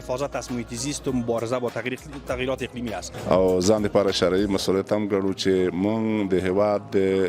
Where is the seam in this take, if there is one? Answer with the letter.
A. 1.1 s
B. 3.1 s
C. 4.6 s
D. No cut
B